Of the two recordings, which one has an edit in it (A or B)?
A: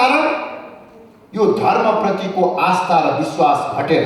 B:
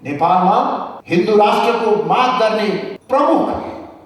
B